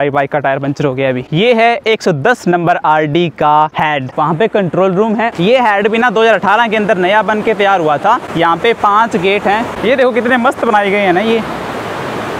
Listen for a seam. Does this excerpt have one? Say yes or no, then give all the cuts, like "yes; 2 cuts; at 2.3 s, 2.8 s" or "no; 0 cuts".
no; 0 cuts